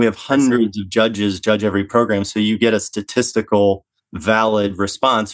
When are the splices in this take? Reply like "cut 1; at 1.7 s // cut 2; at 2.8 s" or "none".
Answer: none